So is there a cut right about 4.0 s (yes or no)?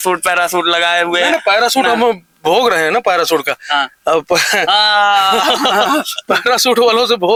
no